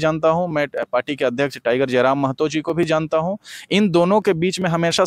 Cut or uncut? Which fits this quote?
uncut